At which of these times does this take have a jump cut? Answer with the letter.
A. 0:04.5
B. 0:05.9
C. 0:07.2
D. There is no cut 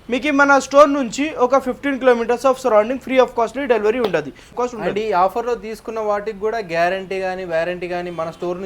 A